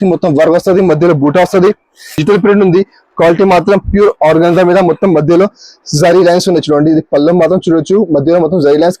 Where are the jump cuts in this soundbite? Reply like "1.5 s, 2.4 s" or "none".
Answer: 2.2 s